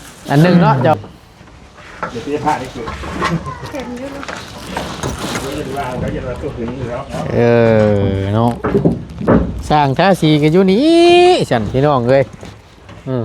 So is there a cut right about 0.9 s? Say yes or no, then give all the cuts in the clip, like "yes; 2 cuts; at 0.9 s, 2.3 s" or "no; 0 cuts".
yes; 1 cut; at 0.9 s